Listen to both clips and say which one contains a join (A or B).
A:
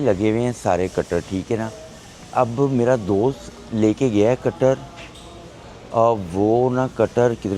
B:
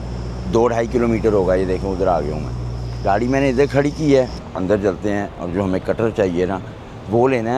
B